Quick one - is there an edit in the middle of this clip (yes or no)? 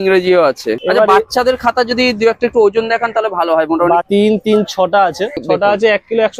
yes